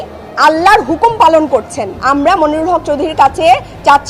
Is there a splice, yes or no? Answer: yes